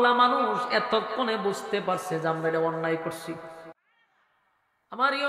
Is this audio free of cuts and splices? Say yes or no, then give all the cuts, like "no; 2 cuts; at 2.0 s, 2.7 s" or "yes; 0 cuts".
no; 1 cut; at 3.8 s